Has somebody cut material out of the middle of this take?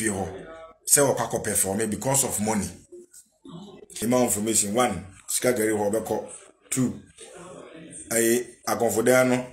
yes; 1 cut; at 4.0 s

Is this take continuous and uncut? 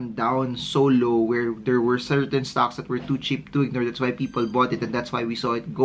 yes; 0 cuts

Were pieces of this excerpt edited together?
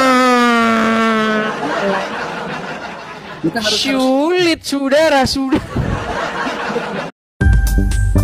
yes; 1 cut; at 7.1 s

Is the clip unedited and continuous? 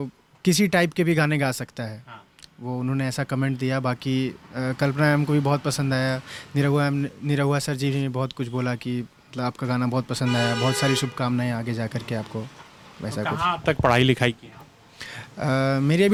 yes; 0 cuts

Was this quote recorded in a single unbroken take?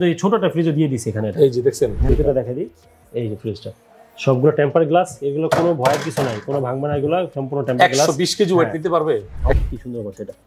no; 2 cuts; at 2.1 s, 9.6 s

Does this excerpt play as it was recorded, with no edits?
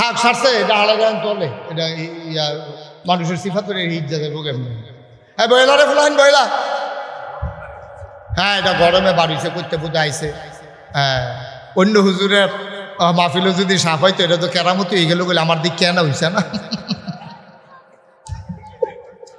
yes; 0 cuts

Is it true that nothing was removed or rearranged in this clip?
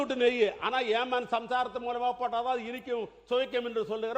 yes; 0 cuts

